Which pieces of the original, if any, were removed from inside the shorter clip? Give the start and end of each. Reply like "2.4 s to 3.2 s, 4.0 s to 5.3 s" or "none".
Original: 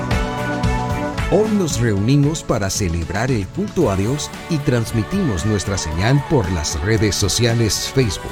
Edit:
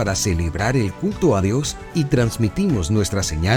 none